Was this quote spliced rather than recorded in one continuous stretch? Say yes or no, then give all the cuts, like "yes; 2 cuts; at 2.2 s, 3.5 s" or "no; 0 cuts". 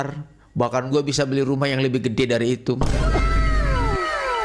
no; 0 cuts